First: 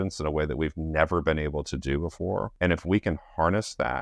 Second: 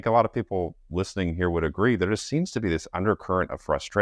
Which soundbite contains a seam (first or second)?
first